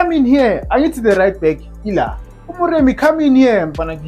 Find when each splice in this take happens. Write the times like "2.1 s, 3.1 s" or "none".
none